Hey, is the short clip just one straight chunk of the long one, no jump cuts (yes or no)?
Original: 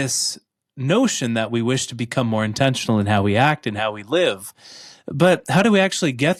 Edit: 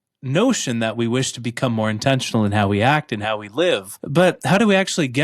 no